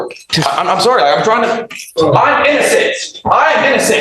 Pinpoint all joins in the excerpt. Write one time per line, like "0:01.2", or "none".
0:01.9